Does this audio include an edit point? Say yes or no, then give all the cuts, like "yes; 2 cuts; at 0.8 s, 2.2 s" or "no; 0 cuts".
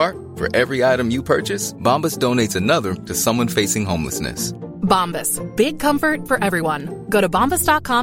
no; 0 cuts